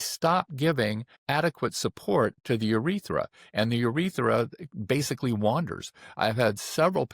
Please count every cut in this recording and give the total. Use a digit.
1